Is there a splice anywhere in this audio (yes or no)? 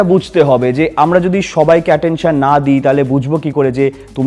no